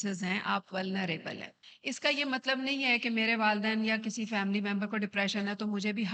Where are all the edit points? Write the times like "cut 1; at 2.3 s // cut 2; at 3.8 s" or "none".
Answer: cut 1; at 1.7 s